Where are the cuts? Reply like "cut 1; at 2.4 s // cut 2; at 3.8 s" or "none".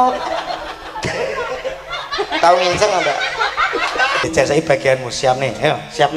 cut 1; at 4.2 s